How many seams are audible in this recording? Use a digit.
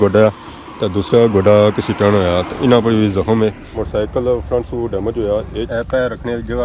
2